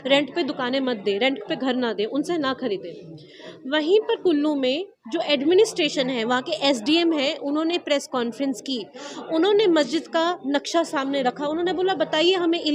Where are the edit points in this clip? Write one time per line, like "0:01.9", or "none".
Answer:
none